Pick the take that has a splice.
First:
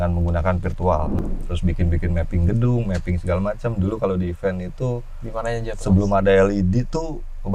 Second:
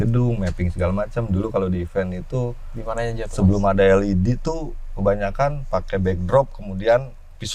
first; 1 cut; at 1.2 s

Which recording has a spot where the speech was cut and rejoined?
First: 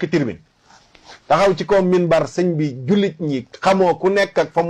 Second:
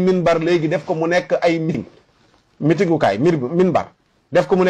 second; 1 cut; at 1.7 s

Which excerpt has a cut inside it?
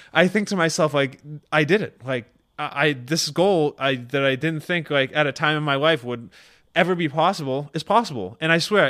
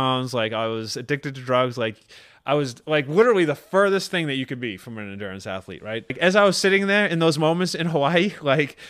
second; 1 cut; at 6.2 s

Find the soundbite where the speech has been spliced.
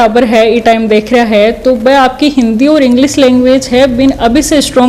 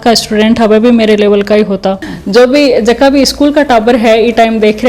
second; 1 cut; at 2.1 s

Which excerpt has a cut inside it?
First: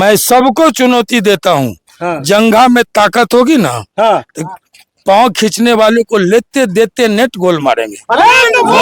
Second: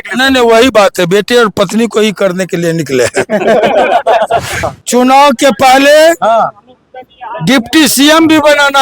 second; 1 cut; at 4.7 s

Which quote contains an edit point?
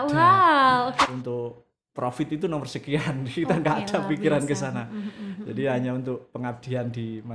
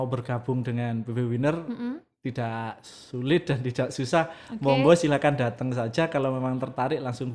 first; 1 cut; at 1.1 s

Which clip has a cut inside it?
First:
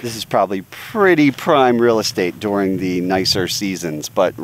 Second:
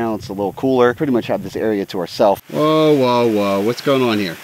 second; 2 cuts; at 1.0 s, 2.5 s

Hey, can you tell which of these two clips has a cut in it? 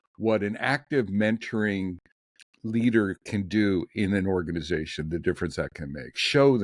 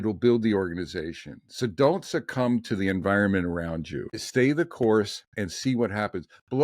second; 1 cut; at 4.2 s

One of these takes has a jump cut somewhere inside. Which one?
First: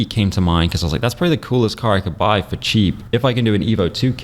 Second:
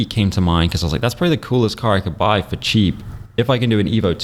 first; 1 cut; at 3.0 s

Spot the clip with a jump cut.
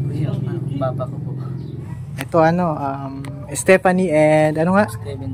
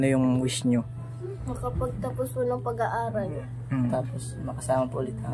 first; 1 cut; at 1.8 s

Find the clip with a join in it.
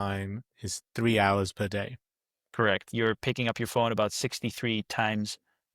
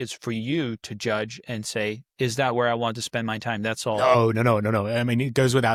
first; 1 cut; at 2.9 s

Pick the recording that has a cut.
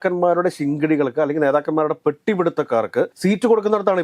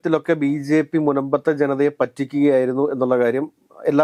first; 1 cut; at 3.1 s

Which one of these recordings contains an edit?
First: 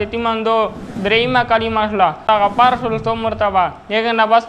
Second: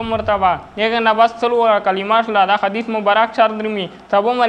first; 1 cut; at 2.2 s

